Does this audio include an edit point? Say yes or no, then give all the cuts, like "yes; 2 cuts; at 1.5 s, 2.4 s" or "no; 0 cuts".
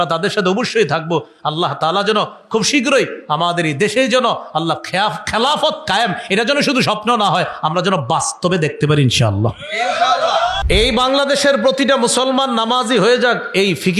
yes; 1 cut; at 10.6 s